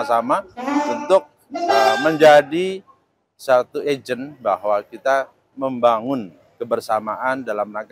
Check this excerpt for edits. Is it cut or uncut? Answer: cut